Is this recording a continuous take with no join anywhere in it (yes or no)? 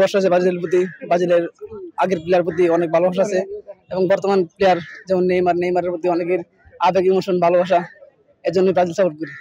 yes